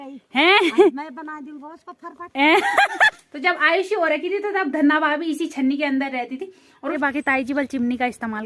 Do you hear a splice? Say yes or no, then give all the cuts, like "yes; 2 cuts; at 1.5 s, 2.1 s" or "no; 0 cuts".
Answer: yes; 2 cuts; at 3.1 s, 6.9 s